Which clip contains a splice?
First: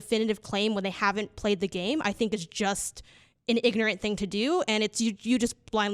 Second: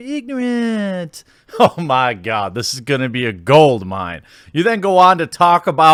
first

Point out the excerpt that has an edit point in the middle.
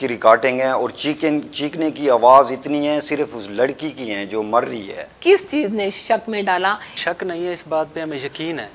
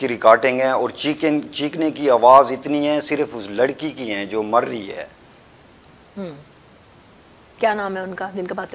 first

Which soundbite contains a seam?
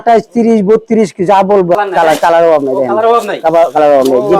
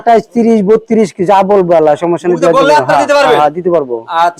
first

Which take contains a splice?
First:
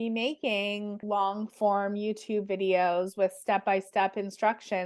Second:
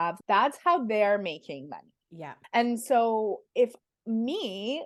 first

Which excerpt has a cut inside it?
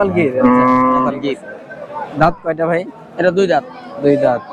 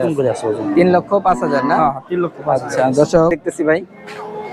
second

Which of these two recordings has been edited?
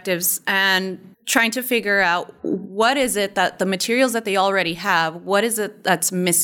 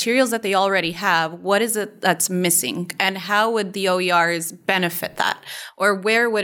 first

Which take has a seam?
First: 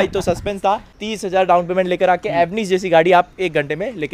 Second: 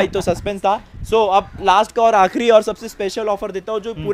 first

